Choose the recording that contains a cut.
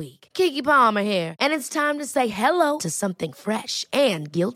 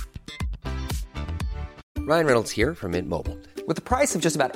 second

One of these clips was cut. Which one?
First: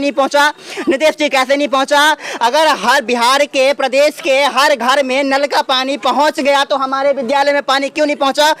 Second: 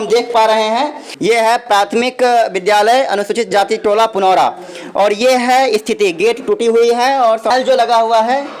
second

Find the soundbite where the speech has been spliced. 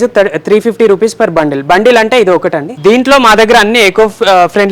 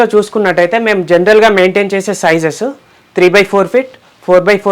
first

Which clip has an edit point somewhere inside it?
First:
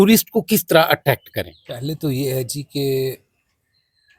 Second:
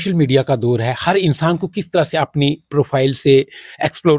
first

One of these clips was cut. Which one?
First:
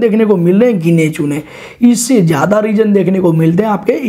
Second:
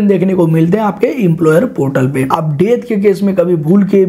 second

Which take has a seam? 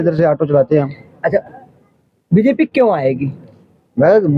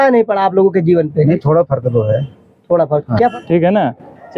second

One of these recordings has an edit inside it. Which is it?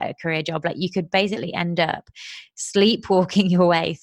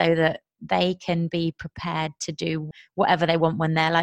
second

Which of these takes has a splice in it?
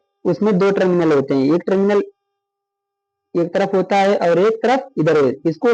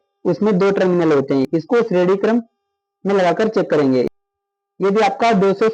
second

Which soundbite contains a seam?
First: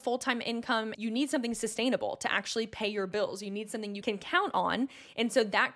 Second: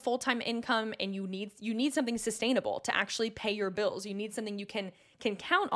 first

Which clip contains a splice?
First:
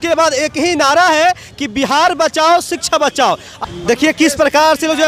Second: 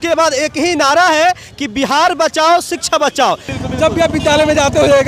second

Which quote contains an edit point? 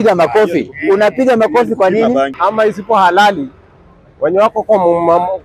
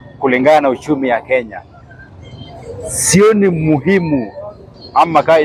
first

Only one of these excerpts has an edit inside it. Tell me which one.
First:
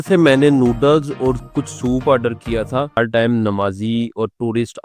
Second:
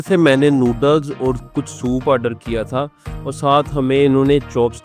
first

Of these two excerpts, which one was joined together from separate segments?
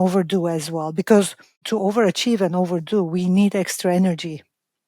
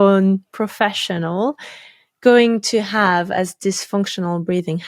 first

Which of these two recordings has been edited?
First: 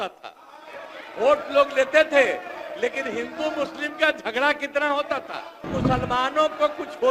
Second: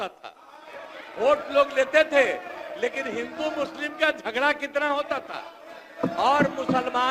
first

